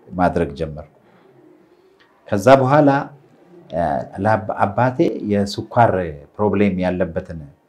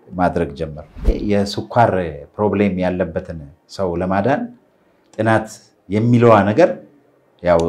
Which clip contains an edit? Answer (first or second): second